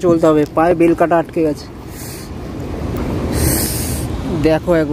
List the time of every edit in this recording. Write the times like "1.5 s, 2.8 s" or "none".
none